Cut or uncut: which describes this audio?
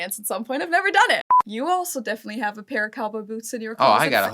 cut